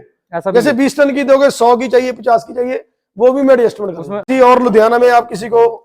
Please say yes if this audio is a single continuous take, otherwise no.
no